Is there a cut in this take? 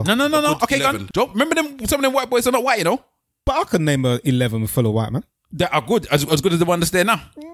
yes; 2 cuts; at 1.0 s, 3.4 s

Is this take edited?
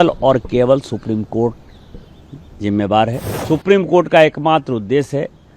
yes; 1 cut; at 3.3 s

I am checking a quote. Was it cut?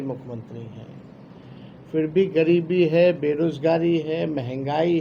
no; 0 cuts

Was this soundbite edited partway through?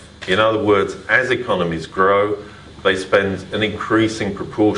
yes; 1 cut; at 1.8 s

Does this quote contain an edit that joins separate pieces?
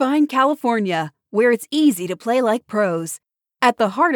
no; 0 cuts

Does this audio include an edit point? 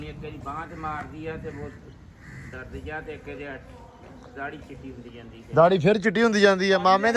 no; 0 cuts

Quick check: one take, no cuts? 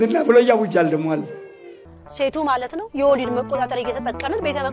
no; 1 cut; at 1.8 s

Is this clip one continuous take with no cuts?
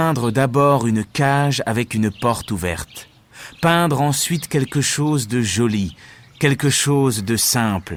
yes; 0 cuts

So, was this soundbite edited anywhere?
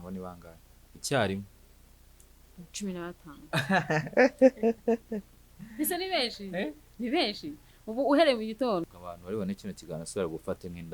yes; 1 cut; at 8.9 s

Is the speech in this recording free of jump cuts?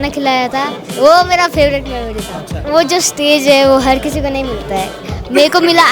no; 1 cut; at 2.6 s

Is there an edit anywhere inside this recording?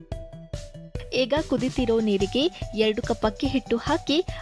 yes; 1 cut; at 1.0 s

